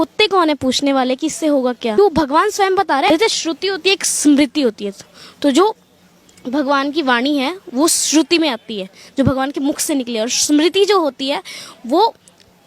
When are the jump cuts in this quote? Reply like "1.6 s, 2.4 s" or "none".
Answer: 2.0 s, 3.1 s